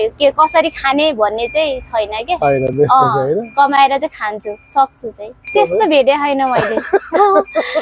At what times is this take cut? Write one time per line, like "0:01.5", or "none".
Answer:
0:05.4